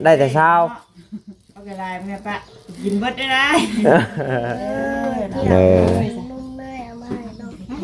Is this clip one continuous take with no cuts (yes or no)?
no